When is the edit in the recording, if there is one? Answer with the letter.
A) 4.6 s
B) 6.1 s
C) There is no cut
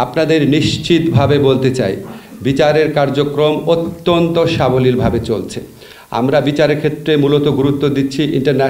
C